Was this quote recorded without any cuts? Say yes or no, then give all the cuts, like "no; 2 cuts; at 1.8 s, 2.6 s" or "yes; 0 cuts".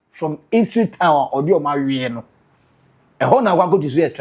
yes; 0 cuts